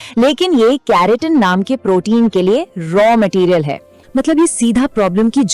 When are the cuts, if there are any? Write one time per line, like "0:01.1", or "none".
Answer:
0:03.9